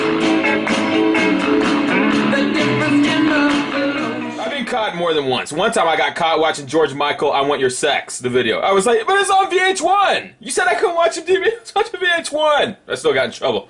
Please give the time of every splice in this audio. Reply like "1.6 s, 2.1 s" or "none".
1.1 s